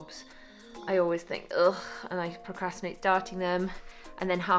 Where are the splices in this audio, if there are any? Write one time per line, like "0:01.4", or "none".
none